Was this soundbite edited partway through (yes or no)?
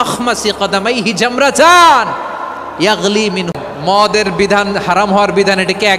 yes